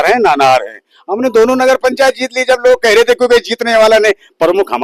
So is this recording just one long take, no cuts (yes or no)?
yes